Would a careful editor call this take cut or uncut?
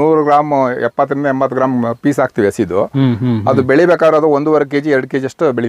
uncut